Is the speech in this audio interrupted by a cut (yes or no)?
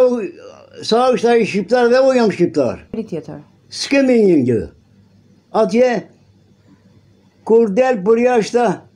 yes